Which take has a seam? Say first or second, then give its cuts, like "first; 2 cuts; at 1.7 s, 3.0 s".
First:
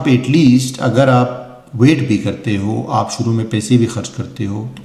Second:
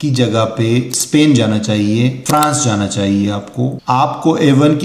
second; 2 cuts; at 2.2 s, 3.8 s